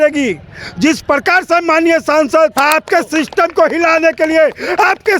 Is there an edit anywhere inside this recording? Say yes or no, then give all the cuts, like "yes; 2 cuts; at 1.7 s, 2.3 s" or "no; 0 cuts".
yes; 1 cut; at 2.5 s